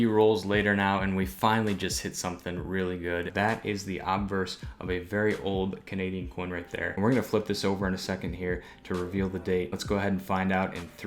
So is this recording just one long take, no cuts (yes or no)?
no